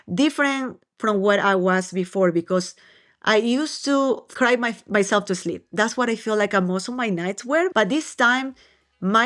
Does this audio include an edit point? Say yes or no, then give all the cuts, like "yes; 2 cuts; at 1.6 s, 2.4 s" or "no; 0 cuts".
yes; 2 cuts; at 4.3 s, 7.7 s